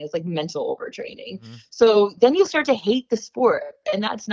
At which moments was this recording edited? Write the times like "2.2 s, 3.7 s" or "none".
none